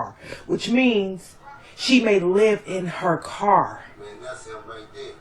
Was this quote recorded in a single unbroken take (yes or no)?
no